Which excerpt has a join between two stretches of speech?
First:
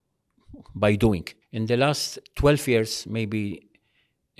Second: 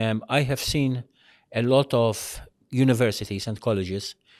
first; 1 cut; at 1.4 s

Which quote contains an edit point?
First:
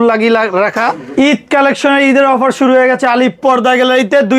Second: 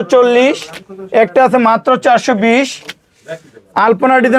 first; 1 cut; at 1.0 s

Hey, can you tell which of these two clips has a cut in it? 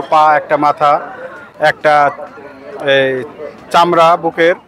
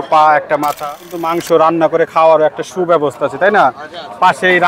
second; 1 cut; at 1.3 s

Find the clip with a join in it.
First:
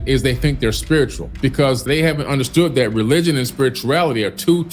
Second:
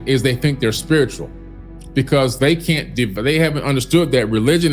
first; 1 cut; at 1.8 s

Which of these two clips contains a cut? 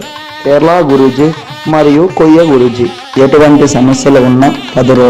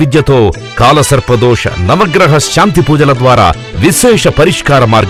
first; 1 cut; at 3.1 s

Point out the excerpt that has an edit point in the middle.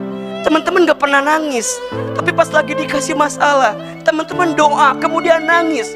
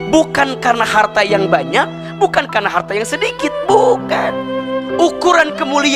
second; 1 cut; at 4.6 s

